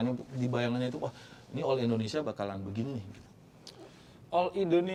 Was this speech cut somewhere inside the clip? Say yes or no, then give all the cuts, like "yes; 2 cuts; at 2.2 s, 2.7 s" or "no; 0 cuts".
no; 0 cuts